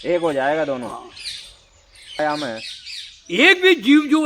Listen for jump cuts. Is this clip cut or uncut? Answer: cut